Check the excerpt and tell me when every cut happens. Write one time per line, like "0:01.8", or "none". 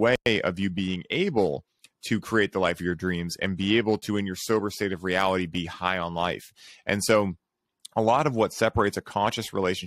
none